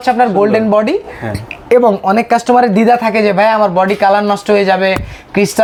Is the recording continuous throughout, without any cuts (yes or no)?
yes